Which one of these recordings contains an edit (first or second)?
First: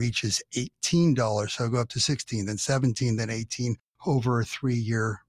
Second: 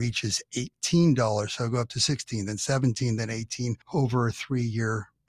second